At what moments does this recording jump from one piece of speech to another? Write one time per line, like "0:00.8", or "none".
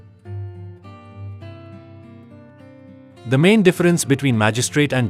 0:03.5